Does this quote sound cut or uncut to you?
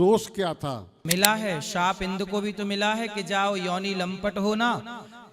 cut